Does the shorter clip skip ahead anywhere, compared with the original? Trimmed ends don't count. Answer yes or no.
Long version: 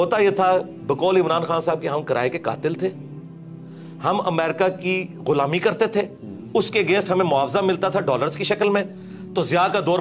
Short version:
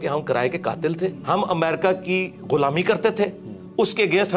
yes